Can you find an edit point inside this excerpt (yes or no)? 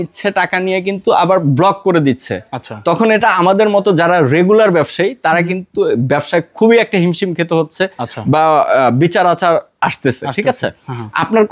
no